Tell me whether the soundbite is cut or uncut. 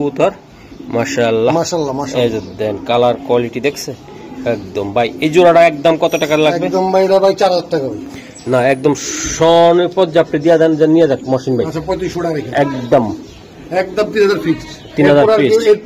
uncut